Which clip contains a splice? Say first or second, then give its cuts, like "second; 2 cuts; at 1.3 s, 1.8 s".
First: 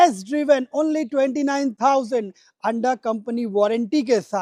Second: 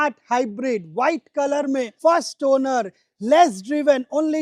second; 1 cut; at 1.9 s